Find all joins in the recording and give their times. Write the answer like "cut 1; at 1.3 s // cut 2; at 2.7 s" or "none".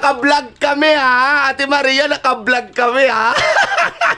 cut 1; at 1.3 s